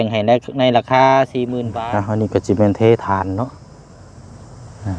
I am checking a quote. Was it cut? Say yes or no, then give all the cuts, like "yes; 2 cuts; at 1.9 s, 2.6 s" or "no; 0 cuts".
yes; 1 cut; at 1.6 s